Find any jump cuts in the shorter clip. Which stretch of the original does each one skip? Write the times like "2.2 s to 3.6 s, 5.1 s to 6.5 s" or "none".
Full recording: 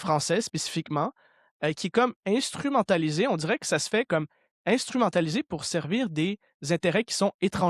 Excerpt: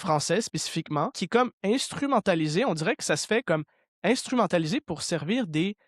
1.2 s to 1.8 s